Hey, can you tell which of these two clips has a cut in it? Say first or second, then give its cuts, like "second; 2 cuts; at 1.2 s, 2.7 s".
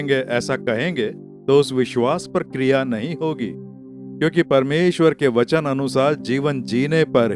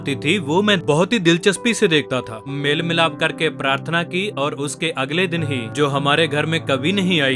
second; 3 cuts; at 0.8 s, 2.5 s, 5.7 s